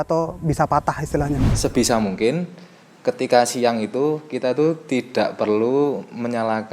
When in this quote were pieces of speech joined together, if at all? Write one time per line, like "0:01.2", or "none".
0:01.5